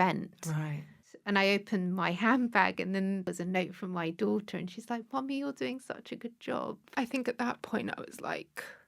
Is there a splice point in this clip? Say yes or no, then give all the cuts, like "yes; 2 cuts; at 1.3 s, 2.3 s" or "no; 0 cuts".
yes; 3 cuts; at 1.1 s, 3.3 s, 6.9 s